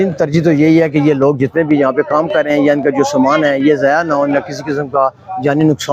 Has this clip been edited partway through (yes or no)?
no